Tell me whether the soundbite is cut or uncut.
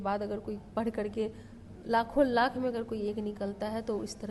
uncut